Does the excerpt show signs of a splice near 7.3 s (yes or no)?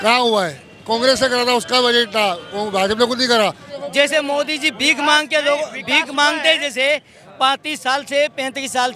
no